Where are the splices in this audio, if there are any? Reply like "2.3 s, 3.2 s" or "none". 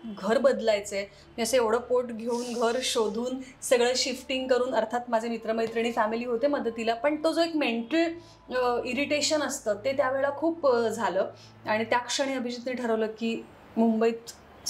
none